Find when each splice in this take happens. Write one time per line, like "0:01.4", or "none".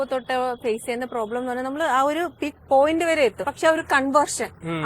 0:02.5
0:03.5